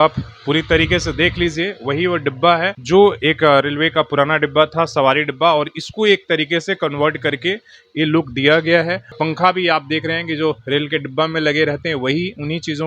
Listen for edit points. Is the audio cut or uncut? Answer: cut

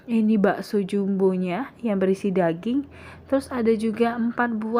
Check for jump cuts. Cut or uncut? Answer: uncut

